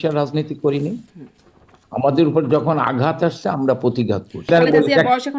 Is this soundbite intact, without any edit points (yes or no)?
no